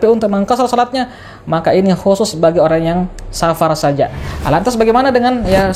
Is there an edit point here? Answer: yes; 1 cut; at 4.3 s

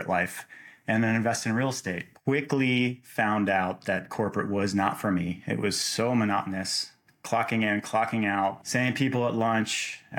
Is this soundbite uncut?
no; 2 cuts; at 2.1 s, 8.6 s

